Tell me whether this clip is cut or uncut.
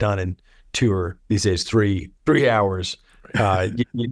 cut